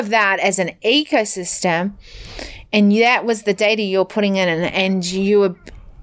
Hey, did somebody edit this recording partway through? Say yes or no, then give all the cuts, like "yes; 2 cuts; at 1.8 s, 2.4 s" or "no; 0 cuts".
no; 0 cuts